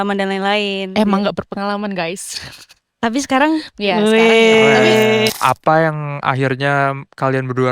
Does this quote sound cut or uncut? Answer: cut